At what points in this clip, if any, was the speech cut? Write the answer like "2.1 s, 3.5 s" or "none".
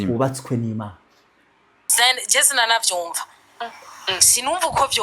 1.9 s